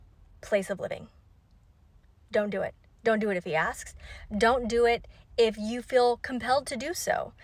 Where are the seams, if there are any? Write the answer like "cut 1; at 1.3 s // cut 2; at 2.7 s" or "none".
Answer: none